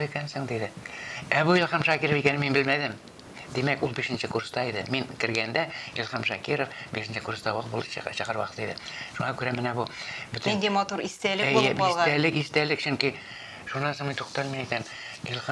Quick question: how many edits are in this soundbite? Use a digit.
0